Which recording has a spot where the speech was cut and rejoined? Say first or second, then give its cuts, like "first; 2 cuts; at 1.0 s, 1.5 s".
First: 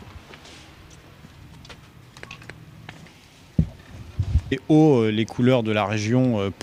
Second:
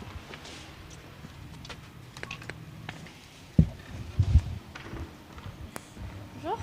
second; 1 cut; at 4.6 s